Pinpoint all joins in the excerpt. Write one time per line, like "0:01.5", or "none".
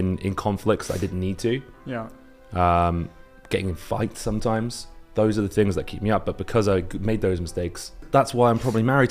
0:08.0